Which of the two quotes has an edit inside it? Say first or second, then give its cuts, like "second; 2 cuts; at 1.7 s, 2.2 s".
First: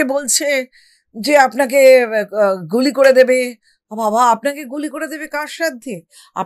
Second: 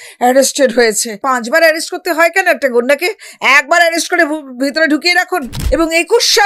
second; 2 cuts; at 1.2 s, 5.5 s